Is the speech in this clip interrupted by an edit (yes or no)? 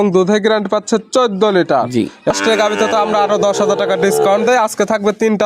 yes